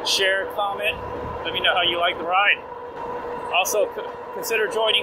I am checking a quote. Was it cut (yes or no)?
yes